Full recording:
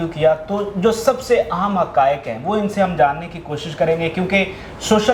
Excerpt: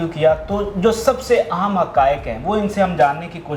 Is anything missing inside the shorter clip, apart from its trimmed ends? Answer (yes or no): no